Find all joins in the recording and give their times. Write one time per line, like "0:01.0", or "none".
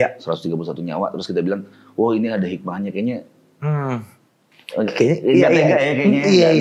none